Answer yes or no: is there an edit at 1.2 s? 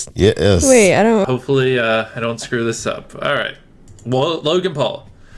yes